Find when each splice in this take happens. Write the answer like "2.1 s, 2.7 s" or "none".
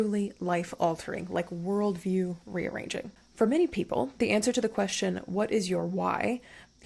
3.2 s